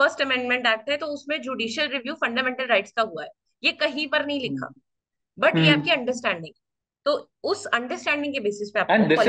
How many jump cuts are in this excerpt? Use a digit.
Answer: 0